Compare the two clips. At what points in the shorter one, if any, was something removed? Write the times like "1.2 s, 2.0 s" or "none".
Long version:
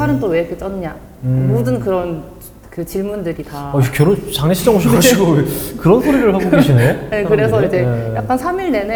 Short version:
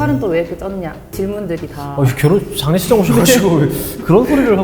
1.0 s